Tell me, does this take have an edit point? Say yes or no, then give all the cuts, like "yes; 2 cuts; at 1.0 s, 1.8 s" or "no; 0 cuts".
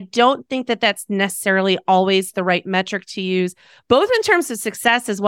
no; 0 cuts